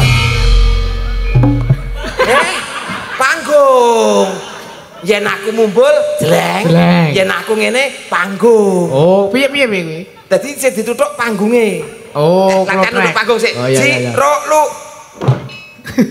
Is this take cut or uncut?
uncut